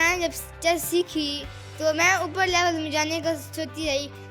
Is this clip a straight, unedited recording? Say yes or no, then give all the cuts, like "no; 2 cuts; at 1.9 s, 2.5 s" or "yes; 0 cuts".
yes; 0 cuts